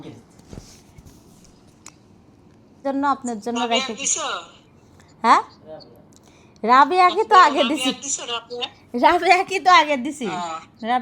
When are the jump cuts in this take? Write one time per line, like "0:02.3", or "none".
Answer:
0:02.8